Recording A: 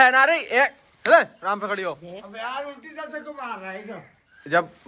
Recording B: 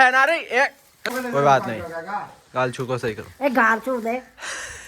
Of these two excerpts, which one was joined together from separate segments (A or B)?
B